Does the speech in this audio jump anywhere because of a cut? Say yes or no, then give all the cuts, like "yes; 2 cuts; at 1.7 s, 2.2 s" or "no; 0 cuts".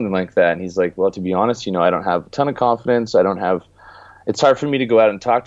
no; 0 cuts